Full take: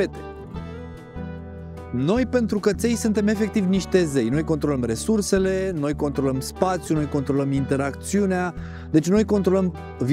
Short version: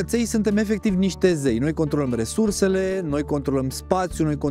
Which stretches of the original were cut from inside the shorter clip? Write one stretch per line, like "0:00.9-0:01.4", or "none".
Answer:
none

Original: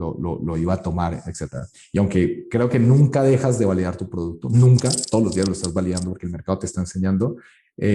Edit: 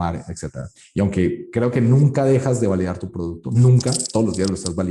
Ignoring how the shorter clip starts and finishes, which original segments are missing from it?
none

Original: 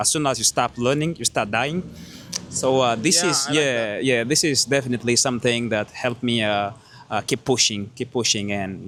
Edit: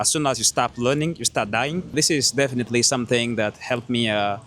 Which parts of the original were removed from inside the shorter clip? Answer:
0:01.9-0:04.3

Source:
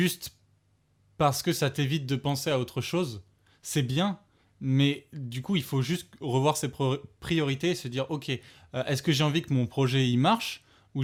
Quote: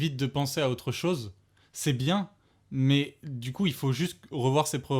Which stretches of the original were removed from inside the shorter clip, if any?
none

